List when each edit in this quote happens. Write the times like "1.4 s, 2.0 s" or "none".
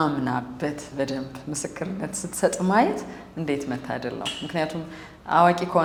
none